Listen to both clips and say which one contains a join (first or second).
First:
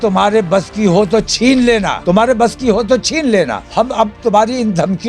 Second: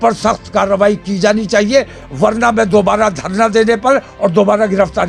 first